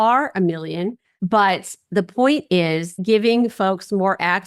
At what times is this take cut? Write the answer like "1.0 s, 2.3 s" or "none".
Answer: 1.1 s, 3.0 s